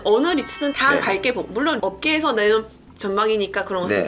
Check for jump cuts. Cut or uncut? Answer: uncut